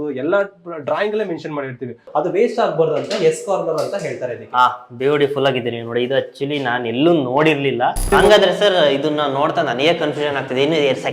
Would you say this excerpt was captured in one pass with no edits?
no; 2 cuts; at 2.0 s, 8.1 s

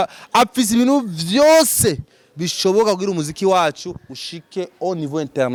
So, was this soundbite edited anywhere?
no; 0 cuts

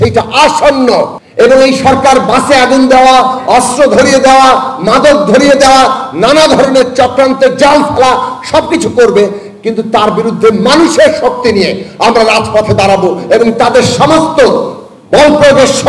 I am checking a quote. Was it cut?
yes; 1 cut; at 1.2 s

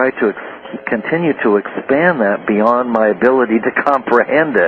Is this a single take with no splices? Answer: no; 1 cut; at 3.8 s

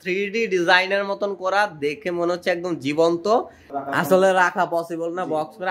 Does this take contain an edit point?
yes; 1 cut; at 3.7 s

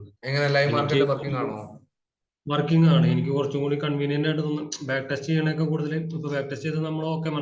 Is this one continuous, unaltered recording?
yes; 0 cuts

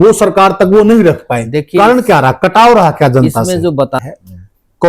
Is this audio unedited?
no; 1 cut; at 4.0 s

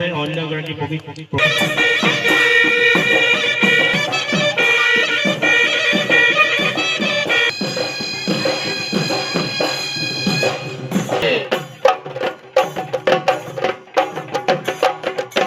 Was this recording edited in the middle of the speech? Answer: yes; 1 cut; at 1.4 s

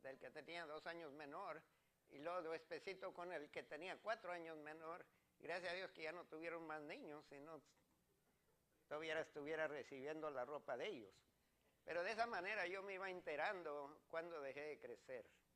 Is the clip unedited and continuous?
no; 1 cut; at 7.0 s

